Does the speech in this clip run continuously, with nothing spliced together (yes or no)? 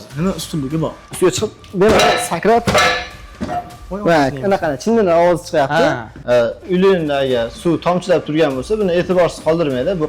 no